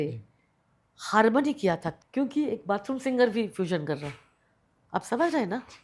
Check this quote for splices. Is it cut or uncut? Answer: cut